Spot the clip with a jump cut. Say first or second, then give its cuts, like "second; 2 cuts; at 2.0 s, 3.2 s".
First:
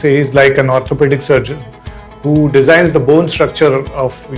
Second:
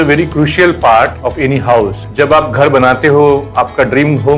second; 2 cuts; at 1.2 s, 2.0 s